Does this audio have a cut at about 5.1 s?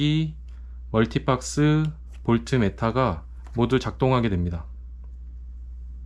no; 0 cuts

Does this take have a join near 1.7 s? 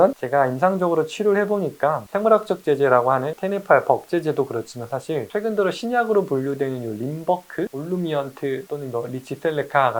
no; 1 cut; at 3.4 s

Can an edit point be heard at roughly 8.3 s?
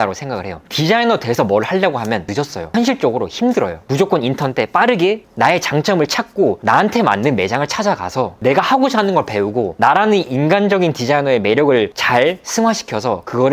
no; 4 cuts; at 2.3 s, 3.8 s, 5.2 s, 6.6 s

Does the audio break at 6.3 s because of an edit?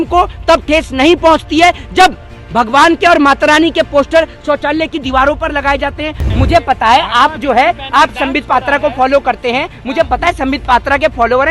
yes; 1 cut; at 6.3 s

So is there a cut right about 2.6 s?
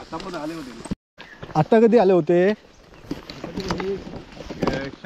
no; 1 cut; at 1.1 s

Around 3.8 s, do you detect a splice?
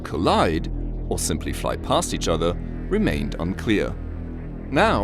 yes; 1 cut; at 3.8 s

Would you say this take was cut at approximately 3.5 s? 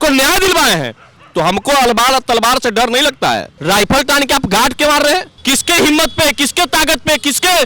yes; 2 cuts; at 3.5 s, 5.3 s

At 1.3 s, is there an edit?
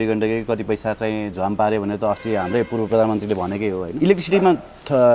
no; 1 cut; at 3.9 s

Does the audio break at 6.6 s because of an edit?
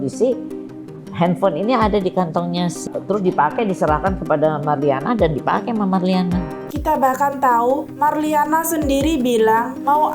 yes; 2 cuts; at 2.8 s, 6.6 s

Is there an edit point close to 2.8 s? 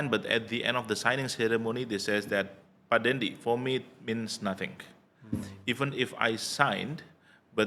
no; 0 cuts

